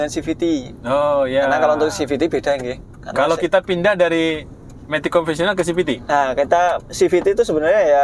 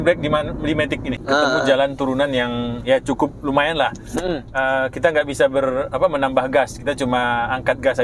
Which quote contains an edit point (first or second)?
second